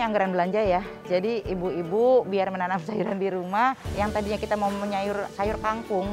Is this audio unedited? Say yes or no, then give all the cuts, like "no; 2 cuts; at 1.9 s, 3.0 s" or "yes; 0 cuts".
no; 3 cuts; at 0.9 s, 3.9 s, 5.3 s